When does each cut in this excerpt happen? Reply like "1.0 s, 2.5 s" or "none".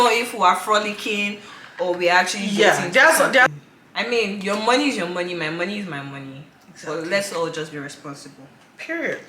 3.5 s